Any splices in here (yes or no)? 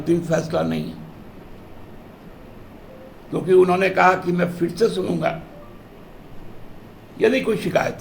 no